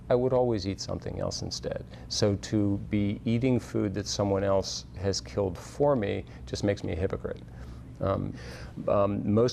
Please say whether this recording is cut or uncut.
uncut